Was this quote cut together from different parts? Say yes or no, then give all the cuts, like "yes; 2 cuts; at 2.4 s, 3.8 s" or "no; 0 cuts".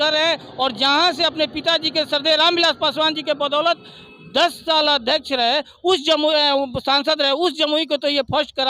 no; 0 cuts